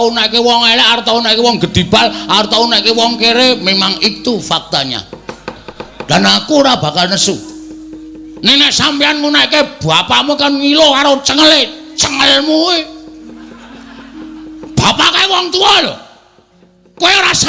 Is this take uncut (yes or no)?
yes